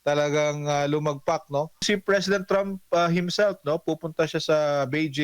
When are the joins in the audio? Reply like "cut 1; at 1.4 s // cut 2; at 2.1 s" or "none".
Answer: cut 1; at 1.8 s